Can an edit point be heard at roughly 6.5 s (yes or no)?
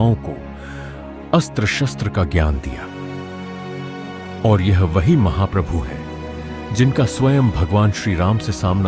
no